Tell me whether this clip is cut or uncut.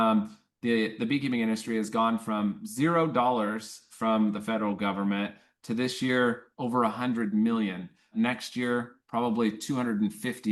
cut